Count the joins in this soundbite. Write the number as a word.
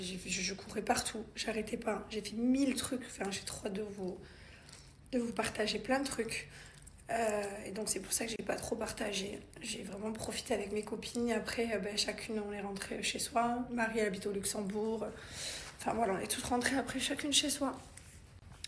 one